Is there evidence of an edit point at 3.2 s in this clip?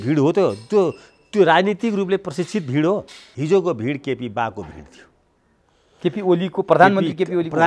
yes; 1 cut; at 3.2 s

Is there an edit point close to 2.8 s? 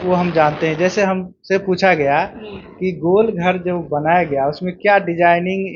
no; 0 cuts

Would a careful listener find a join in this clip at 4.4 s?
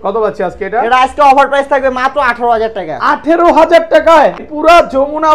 yes; 1 cut; at 4.4 s

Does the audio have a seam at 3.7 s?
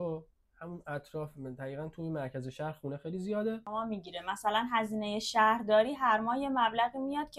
yes; 1 cut; at 3.7 s

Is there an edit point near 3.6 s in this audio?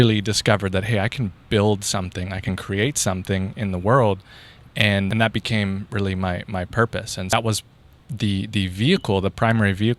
no; 2 cuts; at 5.1 s, 7.3 s

